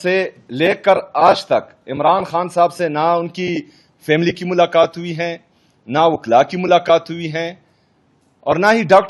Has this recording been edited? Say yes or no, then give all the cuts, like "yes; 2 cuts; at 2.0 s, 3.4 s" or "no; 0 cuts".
no; 0 cuts